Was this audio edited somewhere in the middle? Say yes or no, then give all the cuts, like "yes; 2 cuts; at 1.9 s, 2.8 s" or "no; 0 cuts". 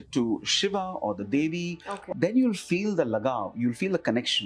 yes; 1 cut; at 1.9 s